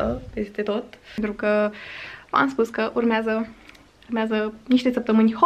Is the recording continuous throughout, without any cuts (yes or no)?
no